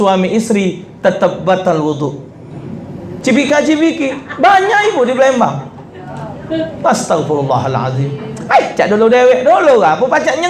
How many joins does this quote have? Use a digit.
1